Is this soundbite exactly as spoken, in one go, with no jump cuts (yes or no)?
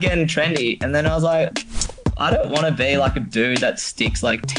yes